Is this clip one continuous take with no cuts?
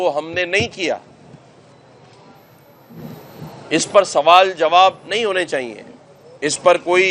yes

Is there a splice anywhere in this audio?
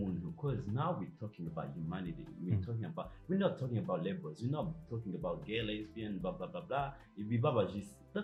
no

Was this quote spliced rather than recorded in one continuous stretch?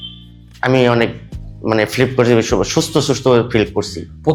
no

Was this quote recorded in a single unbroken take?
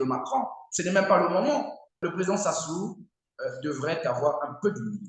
no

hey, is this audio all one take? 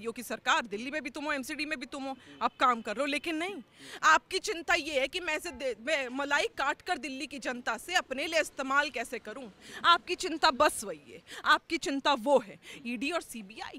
yes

